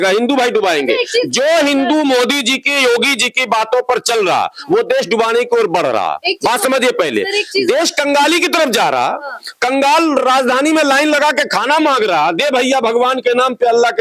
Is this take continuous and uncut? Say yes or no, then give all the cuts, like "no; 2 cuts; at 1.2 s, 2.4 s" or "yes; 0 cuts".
yes; 0 cuts